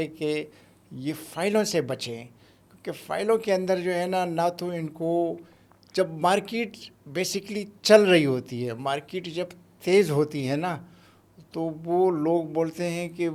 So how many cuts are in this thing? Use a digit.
0